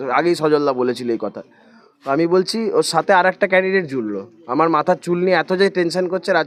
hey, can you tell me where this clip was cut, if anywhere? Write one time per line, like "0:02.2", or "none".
none

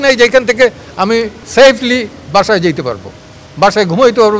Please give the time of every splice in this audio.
none

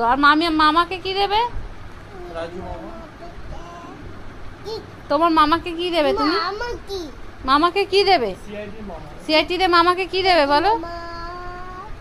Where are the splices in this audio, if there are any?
0:09.8

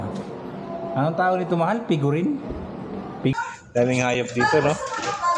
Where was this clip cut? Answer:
0:03.3

